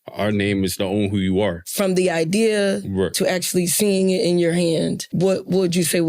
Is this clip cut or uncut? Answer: cut